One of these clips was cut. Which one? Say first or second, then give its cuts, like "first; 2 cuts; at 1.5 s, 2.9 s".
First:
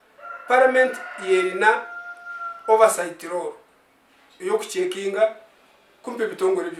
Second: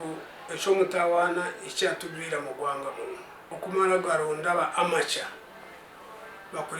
second; 1 cut; at 3.4 s